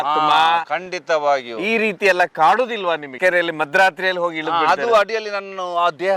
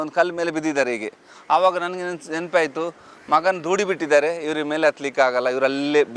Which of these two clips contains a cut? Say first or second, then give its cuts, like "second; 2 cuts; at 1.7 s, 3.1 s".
first; 1 cut; at 3.1 s